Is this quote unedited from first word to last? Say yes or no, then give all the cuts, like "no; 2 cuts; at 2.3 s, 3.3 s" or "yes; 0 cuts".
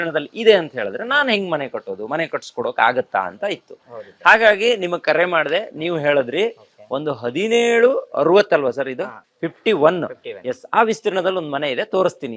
yes; 0 cuts